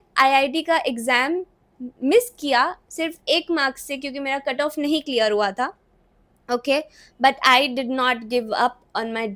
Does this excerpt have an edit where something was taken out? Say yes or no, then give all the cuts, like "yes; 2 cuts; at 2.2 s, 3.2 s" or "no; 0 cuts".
no; 0 cuts